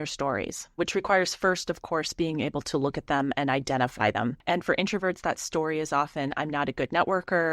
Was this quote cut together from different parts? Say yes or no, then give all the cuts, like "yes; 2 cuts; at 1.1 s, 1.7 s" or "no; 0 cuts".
yes; 2 cuts; at 0.8 s, 4.4 s